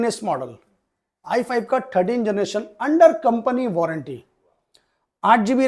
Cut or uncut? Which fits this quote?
uncut